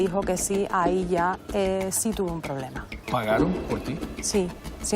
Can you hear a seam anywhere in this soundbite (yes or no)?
yes